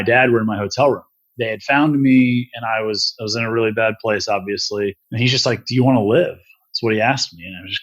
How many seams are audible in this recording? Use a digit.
2